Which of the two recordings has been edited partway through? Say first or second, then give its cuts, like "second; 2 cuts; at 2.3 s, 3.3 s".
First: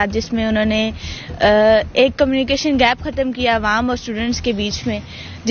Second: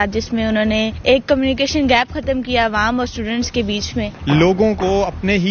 second; 2 cuts; at 1.0 s, 4.2 s